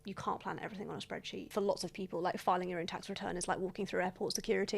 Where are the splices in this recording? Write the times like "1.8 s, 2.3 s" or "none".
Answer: 1.4 s